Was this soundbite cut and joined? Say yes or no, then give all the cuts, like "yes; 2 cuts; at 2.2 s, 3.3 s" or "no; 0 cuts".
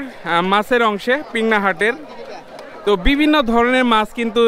no; 0 cuts